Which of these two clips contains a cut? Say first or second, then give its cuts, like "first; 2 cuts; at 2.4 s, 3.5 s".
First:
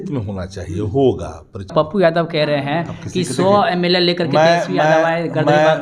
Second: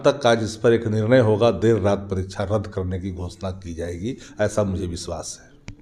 first; 1 cut; at 1.7 s